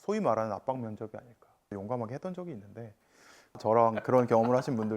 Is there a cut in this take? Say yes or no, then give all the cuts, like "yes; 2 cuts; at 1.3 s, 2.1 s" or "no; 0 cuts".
yes; 2 cuts; at 1.7 s, 3.6 s